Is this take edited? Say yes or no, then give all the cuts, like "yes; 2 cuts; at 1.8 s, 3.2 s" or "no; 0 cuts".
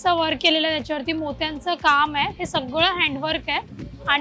no; 0 cuts